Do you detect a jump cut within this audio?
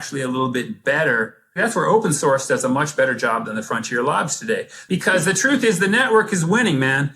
yes; 2 cuts; at 1.6 s, 4.7 s

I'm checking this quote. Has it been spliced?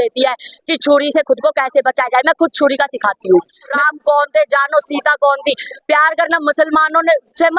yes; 1 cut; at 3.7 s

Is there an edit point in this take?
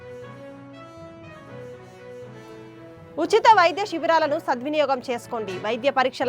no; 0 cuts

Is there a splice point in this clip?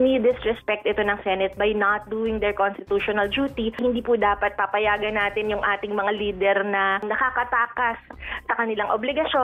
no; 0 cuts

